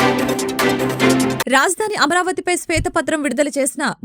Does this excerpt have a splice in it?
yes; 1 cut; at 1.4 s

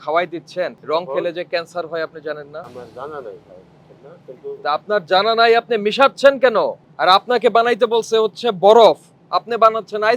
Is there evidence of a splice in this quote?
yes; 2 cuts; at 2.7 s, 6.8 s

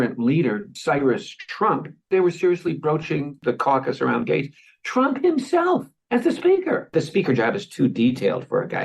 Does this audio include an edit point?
no; 0 cuts

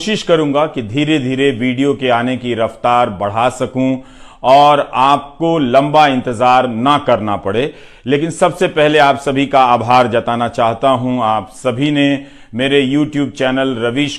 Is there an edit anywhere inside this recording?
no; 0 cuts

